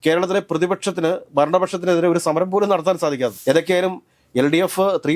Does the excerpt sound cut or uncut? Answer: cut